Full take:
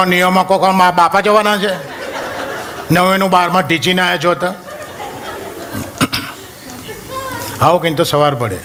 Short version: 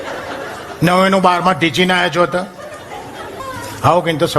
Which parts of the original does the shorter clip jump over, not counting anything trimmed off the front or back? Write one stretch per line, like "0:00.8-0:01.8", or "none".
0:05.5-0:07.2